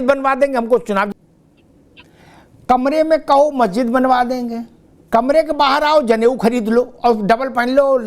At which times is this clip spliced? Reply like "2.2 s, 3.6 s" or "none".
1.1 s